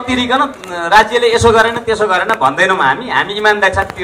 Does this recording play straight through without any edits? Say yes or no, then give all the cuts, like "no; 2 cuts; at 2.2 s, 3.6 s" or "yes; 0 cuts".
yes; 0 cuts